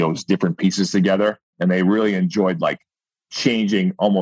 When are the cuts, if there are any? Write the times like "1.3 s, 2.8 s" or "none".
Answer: none